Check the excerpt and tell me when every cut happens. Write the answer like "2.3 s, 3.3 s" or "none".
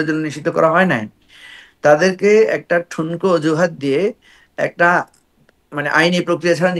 none